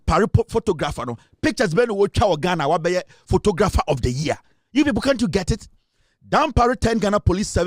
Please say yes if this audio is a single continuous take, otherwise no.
yes